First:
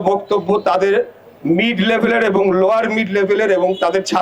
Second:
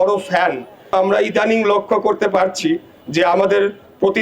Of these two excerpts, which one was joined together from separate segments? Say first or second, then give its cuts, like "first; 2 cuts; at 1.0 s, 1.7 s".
second; 1 cut; at 0.9 s